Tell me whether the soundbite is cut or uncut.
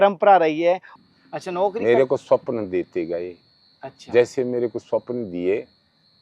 cut